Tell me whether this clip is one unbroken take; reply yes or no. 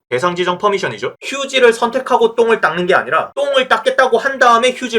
no